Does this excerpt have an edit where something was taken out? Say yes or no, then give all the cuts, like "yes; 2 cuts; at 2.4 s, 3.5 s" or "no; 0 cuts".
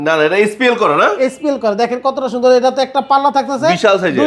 no; 0 cuts